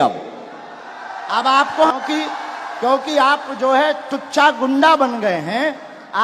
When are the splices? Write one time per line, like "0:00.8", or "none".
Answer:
0:01.9